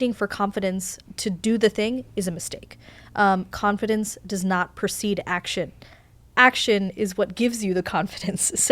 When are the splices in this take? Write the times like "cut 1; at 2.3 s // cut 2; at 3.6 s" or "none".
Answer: cut 1; at 0.9 s